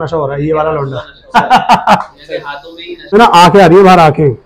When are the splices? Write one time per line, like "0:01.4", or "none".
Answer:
0:03.1